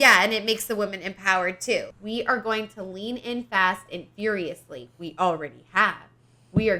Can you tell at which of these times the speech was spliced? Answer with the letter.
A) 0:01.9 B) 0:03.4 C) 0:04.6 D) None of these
A